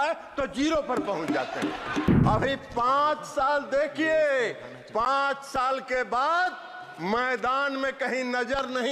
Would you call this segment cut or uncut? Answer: cut